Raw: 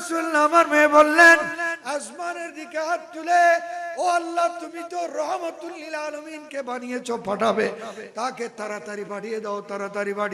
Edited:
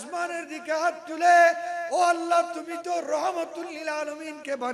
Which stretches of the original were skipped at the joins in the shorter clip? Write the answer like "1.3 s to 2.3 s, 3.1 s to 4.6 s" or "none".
none

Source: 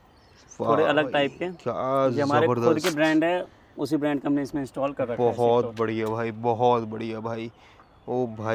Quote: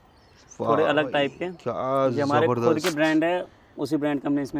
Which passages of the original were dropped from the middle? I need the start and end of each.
none

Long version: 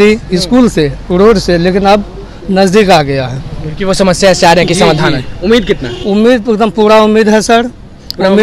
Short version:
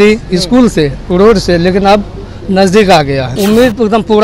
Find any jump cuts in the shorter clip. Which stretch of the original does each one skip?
3.3 s to 6.0 s

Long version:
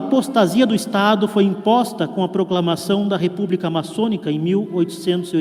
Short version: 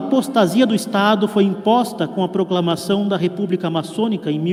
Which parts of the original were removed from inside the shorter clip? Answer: none

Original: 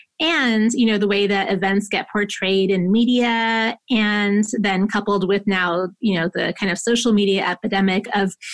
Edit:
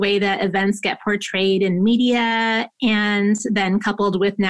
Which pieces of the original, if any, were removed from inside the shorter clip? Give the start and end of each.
none

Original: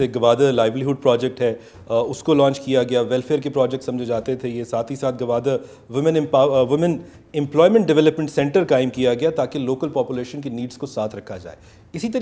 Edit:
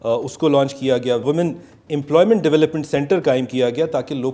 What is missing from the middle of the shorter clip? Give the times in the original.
3.1 s to 6.7 s

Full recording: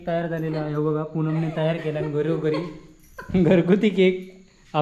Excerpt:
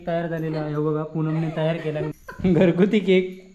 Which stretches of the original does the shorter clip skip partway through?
2.1 s to 3.0 s

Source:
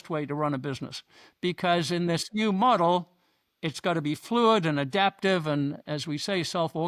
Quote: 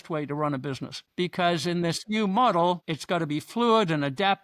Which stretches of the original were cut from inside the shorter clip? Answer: 0.9 s to 1.2 s, 3.2 s to 3.7 s

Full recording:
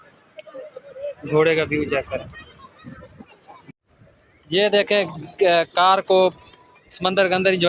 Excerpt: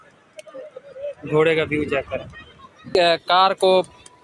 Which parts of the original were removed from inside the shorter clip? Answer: 2.8 s to 5.3 s

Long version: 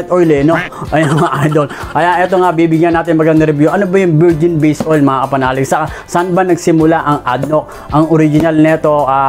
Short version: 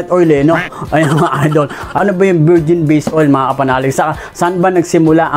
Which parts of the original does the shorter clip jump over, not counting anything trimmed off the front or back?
2.0 s to 3.7 s

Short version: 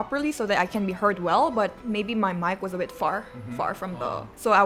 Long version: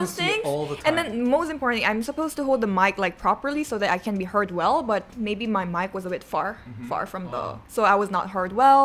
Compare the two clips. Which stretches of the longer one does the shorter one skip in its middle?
none

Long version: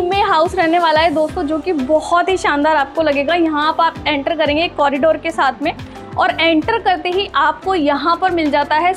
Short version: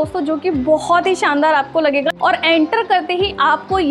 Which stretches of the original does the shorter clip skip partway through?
3.3 s to 6.1 s

